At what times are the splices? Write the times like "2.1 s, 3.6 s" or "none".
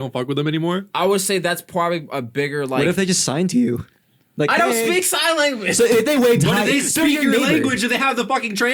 none

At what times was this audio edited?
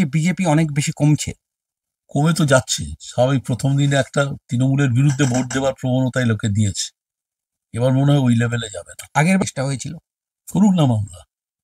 9.4 s

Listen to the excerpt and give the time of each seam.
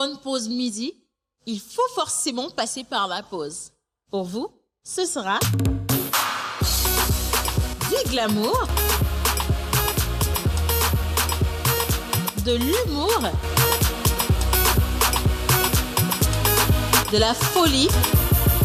none

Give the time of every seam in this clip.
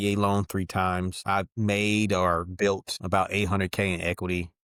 none

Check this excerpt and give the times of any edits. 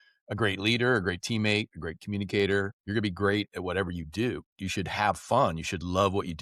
2.8 s, 4.5 s

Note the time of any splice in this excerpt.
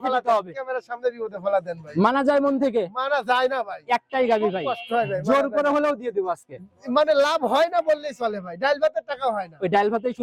none

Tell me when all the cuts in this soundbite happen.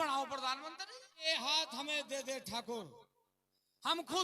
1.3 s

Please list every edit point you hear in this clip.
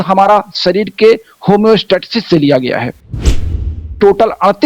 3.5 s

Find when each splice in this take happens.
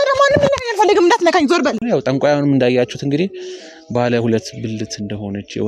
1.8 s

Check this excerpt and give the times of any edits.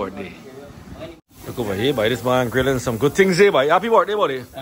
1.1 s

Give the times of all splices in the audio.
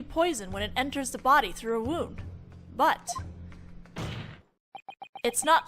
3.9 s

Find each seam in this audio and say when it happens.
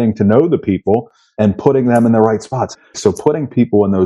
1.2 s, 2.8 s

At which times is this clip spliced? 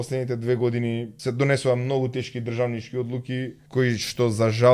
1.1 s, 3.6 s

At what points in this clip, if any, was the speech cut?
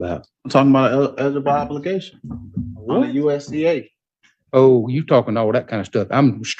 none

